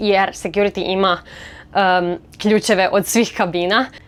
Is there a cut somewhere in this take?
no; 0 cuts

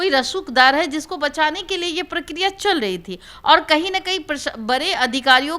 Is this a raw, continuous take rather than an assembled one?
yes; 0 cuts

